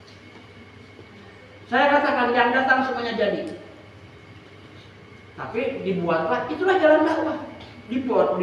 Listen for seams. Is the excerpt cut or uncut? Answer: uncut